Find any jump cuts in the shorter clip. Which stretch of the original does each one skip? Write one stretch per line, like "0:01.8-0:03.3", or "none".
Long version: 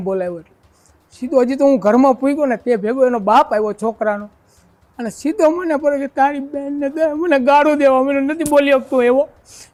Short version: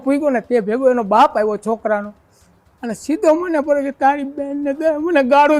none